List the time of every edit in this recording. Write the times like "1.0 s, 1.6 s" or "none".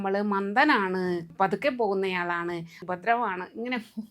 1.3 s, 2.8 s